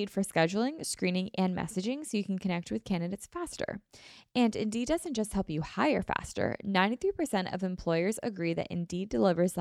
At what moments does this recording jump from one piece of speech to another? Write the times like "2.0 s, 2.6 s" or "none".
none